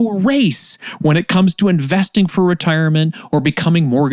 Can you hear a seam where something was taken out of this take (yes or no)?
no